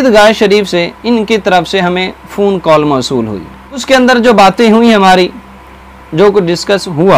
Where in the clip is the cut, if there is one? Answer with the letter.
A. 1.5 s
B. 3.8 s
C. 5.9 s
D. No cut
B